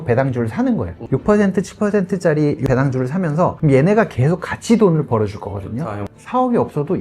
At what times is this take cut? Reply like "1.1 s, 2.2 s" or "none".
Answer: 1.0 s, 2.9 s, 5.8 s

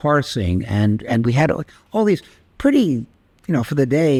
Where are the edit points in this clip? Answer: none

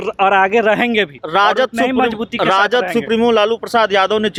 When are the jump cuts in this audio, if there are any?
none

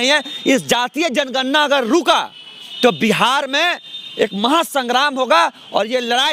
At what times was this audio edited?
none

